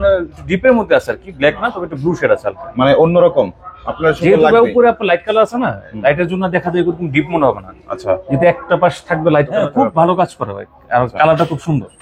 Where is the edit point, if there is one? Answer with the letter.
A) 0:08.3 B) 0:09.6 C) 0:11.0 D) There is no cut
B